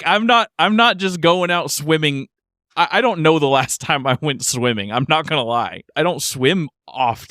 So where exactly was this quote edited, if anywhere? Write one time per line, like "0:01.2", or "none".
0:05.8